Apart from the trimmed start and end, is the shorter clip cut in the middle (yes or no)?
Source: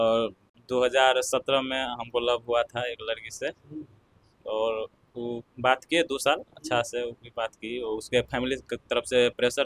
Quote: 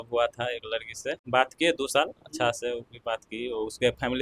yes